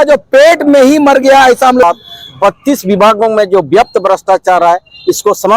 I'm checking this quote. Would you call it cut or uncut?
cut